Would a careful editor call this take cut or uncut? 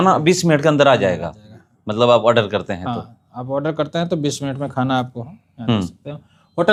uncut